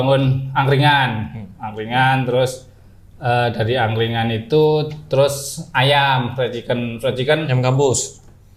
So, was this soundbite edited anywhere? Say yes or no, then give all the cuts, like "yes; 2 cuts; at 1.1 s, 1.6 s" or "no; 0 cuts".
no; 0 cuts